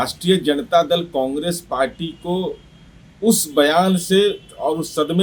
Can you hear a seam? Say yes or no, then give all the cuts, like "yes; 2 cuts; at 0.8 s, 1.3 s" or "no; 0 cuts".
no; 0 cuts